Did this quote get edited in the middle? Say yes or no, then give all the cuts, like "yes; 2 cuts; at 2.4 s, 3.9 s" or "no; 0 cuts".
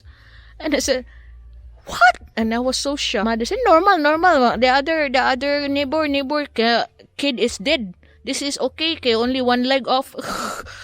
yes; 1 cut; at 3.2 s